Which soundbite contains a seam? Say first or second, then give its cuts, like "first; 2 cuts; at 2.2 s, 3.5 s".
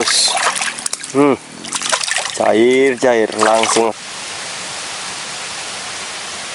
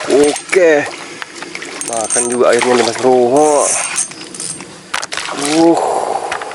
first; 1 cut; at 4.0 s